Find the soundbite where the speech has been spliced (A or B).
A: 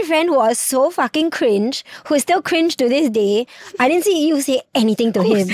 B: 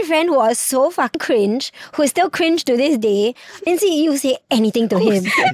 B